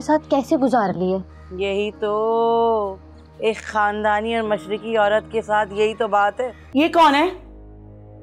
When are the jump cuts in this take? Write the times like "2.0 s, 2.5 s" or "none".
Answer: 6.6 s